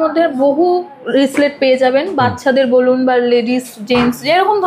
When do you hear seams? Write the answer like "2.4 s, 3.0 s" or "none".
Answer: none